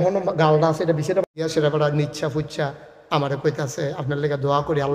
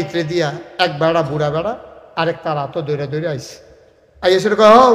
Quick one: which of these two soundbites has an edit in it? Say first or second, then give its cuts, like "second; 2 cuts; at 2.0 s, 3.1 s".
first; 1 cut; at 1.2 s